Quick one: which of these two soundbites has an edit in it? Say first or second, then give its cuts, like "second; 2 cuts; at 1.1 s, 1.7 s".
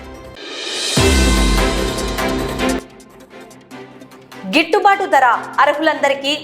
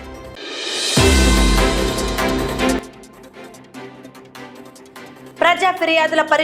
second; 2 cuts; at 2.8 s, 4.8 s